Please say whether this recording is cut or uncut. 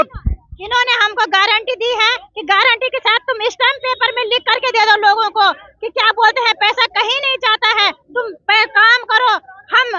uncut